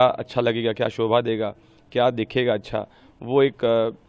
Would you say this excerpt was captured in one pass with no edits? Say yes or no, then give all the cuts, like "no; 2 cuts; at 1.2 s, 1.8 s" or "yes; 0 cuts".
yes; 0 cuts